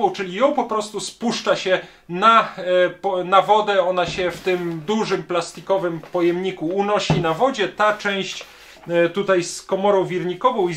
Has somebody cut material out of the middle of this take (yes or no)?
no